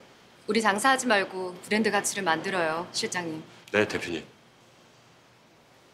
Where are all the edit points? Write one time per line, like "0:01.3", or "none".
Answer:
0:03.5
0:04.6